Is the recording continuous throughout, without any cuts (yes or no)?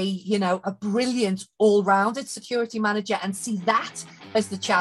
yes